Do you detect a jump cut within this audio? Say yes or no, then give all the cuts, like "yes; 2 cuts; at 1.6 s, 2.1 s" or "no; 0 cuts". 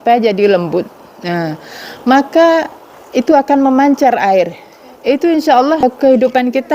yes; 1 cut; at 5.8 s